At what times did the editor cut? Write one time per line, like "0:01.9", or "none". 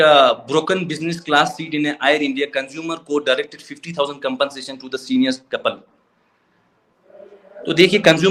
none